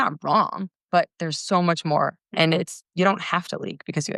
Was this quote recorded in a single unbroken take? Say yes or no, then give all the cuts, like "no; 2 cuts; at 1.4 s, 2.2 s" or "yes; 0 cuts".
no; 1 cut; at 2.3 s